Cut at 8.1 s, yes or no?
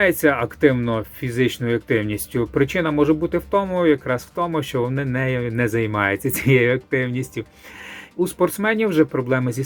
yes